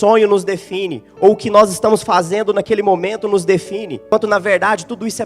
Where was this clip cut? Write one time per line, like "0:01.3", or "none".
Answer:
0:04.1